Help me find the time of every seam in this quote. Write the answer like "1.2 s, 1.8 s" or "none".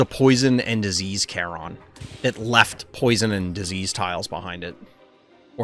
none